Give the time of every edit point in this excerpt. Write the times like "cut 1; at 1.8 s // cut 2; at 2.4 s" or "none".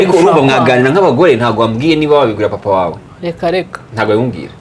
cut 1; at 3.1 s